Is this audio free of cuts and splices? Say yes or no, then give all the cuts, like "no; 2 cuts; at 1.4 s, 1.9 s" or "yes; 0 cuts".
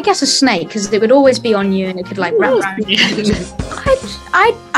no; 1 cut; at 3.6 s